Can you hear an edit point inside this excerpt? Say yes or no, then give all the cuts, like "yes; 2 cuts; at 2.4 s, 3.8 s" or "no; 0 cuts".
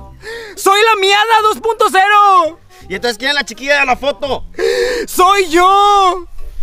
yes; 1 cut; at 4.6 s